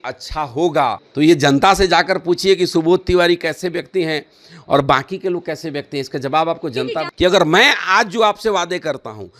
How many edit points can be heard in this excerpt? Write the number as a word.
two